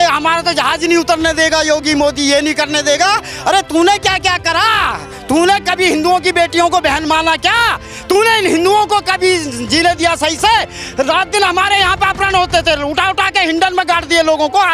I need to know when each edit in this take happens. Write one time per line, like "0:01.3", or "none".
none